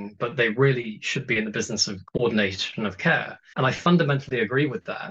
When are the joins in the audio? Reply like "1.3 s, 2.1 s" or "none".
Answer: 1.9 s, 3.4 s